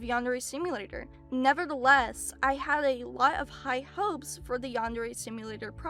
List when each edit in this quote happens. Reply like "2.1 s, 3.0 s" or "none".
none